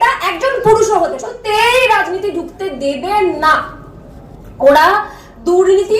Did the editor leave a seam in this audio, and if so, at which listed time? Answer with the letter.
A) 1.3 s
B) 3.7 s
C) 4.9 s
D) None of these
A